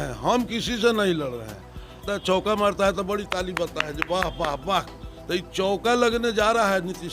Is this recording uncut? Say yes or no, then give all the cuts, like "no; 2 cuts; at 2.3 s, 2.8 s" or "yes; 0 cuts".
no; 1 cut; at 2.1 s